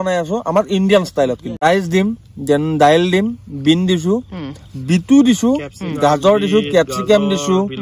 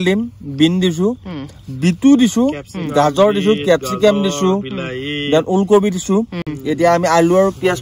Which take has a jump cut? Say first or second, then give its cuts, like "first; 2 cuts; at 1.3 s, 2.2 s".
first; 1 cut; at 1.6 s